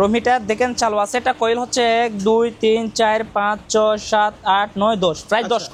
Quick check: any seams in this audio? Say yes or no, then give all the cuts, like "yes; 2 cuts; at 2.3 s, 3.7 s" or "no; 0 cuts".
no; 0 cuts